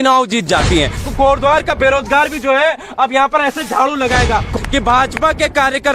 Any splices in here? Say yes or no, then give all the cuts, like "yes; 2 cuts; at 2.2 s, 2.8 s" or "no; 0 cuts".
yes; 2 cuts; at 1.0 s, 4.5 s